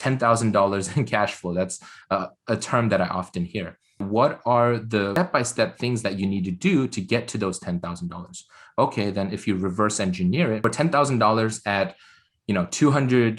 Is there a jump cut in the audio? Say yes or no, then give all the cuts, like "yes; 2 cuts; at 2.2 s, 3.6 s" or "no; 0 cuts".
yes; 3 cuts; at 4.0 s, 5.1 s, 10.6 s